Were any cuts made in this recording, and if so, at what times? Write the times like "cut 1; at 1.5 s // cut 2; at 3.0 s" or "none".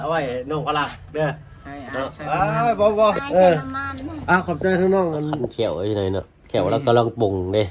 cut 1; at 5.5 s